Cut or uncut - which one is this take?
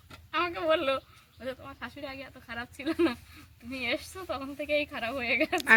uncut